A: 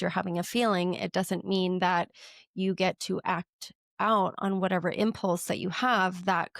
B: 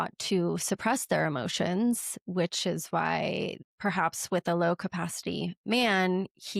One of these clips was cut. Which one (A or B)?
B